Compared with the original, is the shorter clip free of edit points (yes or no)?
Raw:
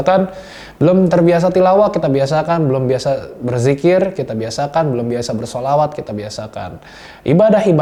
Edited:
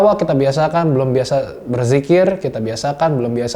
yes